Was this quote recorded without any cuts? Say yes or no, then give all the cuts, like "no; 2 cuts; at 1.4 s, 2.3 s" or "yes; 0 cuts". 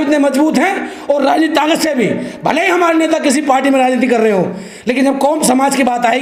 yes; 0 cuts